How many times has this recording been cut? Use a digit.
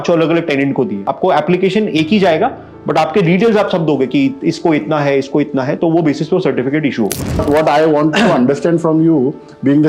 2